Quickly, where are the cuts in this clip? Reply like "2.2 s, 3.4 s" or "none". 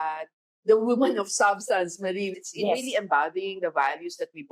2.4 s